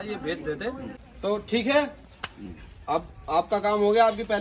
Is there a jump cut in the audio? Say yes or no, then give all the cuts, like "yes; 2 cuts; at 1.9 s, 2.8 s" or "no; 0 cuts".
no; 0 cuts